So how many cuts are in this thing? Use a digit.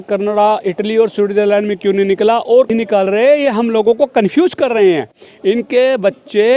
1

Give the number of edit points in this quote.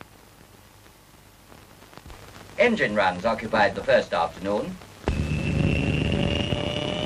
1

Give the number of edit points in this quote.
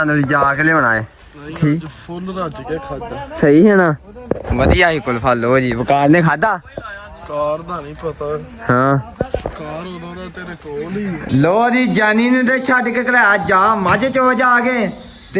1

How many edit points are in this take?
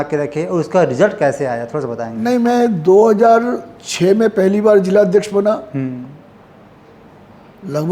0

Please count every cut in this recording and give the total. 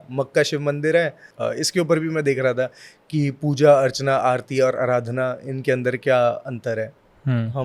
1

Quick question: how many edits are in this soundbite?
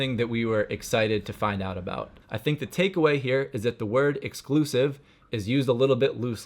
1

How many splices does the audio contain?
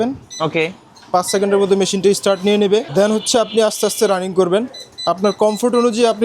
1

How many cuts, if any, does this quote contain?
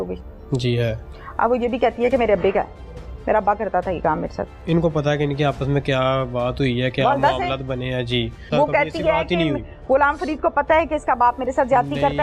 2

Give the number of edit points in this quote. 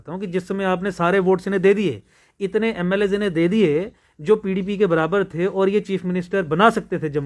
0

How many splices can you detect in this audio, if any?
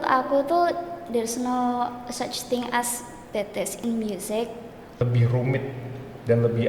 1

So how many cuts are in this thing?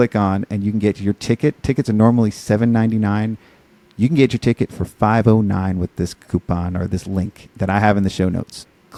0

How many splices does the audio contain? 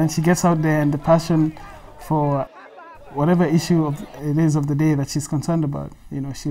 1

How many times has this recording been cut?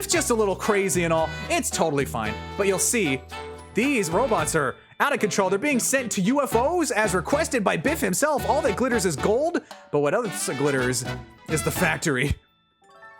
1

